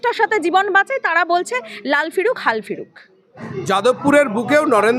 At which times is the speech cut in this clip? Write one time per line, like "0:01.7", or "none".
0:03.4